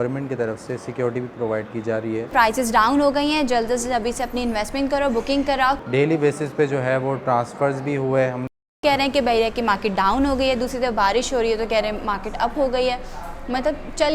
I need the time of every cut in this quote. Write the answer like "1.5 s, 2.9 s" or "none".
2.3 s, 5.8 s, 8.8 s